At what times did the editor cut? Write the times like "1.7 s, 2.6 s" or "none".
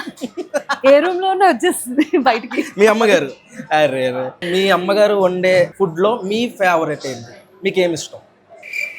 4.5 s, 5.7 s

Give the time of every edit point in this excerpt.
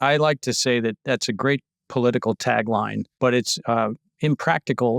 3.0 s

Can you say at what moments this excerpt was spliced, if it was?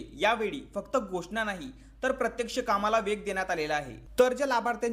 4.0 s

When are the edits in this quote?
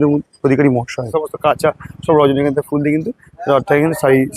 1.0 s

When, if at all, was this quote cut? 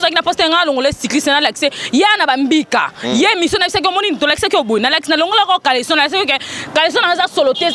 none

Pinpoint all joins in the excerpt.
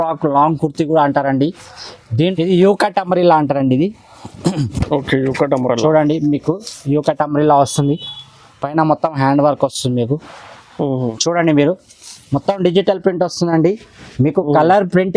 2.3 s, 11.2 s

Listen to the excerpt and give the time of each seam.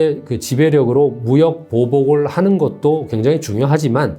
none

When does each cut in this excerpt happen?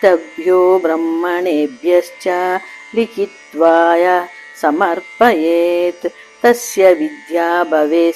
none

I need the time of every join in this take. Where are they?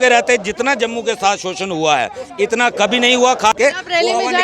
3.5 s

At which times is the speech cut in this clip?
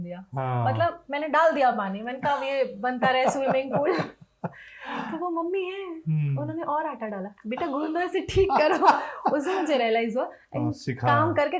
none

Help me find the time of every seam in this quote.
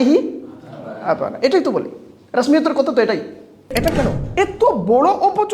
3.7 s

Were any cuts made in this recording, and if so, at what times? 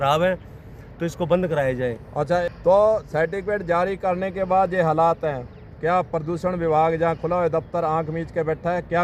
none

